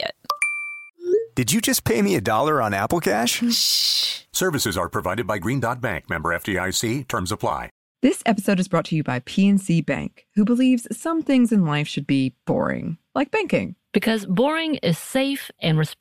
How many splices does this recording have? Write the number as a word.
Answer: one